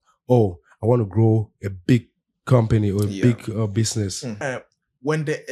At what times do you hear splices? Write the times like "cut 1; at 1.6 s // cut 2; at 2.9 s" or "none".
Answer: cut 1; at 4.4 s